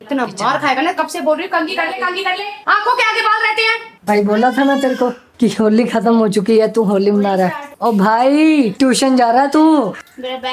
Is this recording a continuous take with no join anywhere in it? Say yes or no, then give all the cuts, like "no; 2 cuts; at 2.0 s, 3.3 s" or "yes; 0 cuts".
yes; 0 cuts